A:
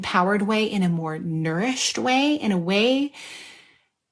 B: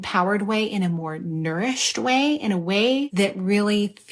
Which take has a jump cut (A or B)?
B